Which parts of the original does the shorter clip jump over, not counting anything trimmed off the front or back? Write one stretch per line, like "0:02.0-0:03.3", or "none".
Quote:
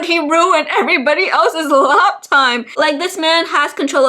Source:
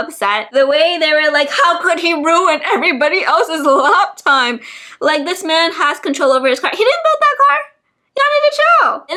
0:04.6-0:04.9